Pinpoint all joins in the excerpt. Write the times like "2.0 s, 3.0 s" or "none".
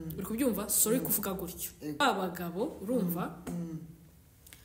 none